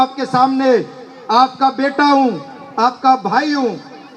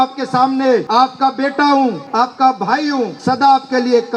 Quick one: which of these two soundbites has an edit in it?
second; 3 cuts; at 0.9 s, 2.0 s, 3.2 s

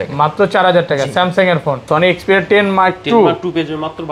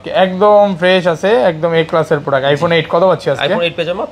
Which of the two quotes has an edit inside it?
first; 1 cut; at 1.8 s

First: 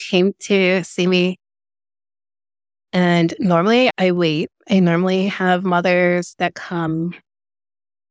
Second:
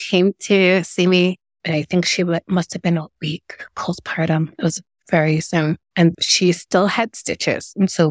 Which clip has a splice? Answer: second; 2 cuts; at 1.5 s, 6.1 s

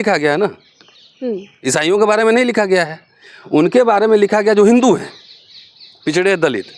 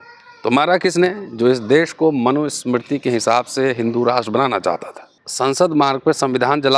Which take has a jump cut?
second; 1 cut; at 5.2 s

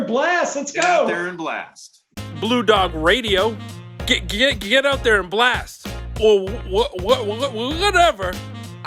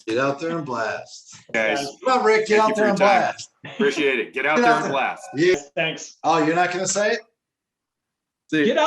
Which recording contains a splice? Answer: second; 2 cuts; at 1.5 s, 5.5 s

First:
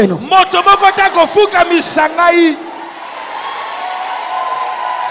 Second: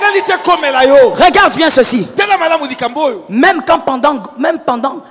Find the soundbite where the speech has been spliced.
first; 1 cut; at 3.0 s

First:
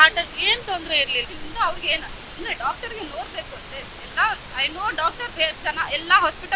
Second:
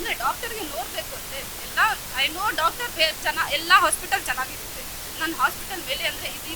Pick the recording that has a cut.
first; 1 cut; at 1.2 s

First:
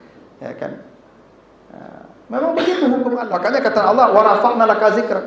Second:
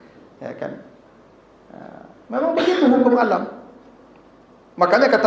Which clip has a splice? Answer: first; 1 cut; at 3.3 s

